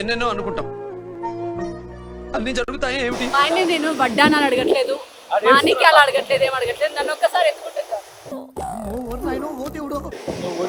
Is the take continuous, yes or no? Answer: yes